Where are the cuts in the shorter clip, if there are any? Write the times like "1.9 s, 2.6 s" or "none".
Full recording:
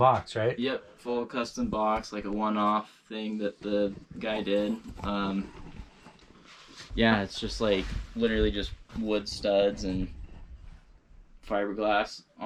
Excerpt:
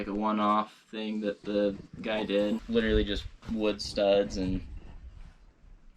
2.6 s